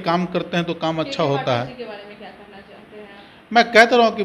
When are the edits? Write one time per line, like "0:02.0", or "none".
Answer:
none